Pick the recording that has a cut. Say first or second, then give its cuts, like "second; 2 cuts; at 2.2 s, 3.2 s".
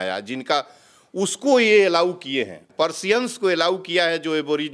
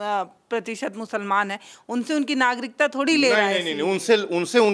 first; 1 cut; at 2.7 s